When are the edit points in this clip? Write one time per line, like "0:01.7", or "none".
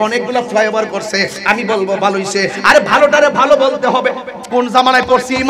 0:04.4

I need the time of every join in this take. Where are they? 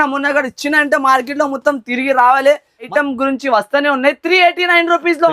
0:02.9

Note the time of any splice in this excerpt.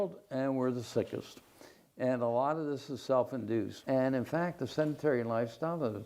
0:03.8

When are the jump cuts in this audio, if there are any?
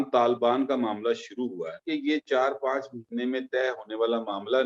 0:01.8

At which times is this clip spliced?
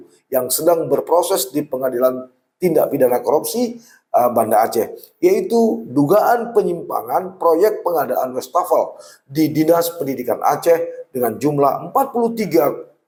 none

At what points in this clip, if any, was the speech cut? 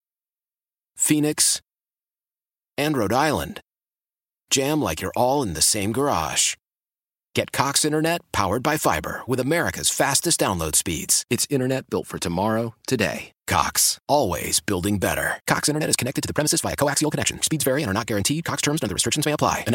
none

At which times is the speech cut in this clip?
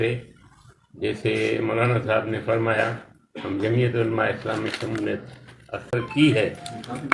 0:05.9

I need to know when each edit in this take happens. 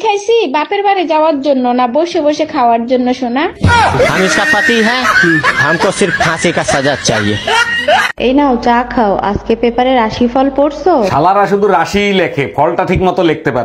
0:08.1

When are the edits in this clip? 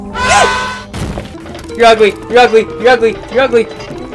0:01.3

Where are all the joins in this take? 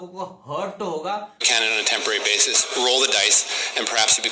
0:01.5

